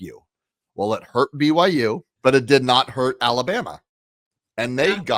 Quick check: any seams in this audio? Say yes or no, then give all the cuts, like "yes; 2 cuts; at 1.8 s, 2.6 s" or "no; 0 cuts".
yes; 1 cut; at 2.1 s